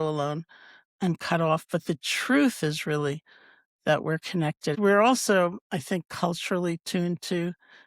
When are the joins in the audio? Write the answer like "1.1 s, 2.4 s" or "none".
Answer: 4.8 s